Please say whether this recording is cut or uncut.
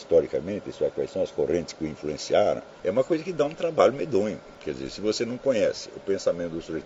cut